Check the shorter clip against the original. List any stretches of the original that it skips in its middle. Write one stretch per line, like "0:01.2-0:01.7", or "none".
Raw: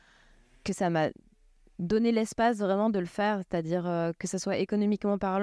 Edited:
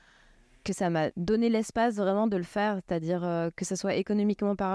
0:01.2-0:01.8